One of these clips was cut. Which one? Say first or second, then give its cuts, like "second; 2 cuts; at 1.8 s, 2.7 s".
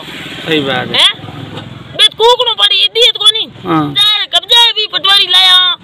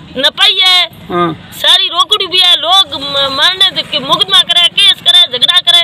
first; 1 cut; at 4.1 s